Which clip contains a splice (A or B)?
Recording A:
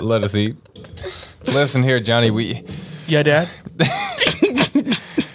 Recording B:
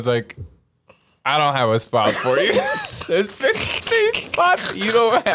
A